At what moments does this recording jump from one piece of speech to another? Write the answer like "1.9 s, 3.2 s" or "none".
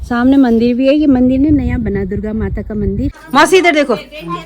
3.1 s